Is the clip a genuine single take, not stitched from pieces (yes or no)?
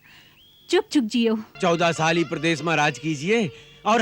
no